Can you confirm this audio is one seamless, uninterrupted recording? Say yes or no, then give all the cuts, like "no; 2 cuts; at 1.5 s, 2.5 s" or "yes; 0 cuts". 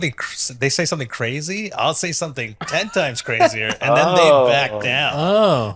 yes; 0 cuts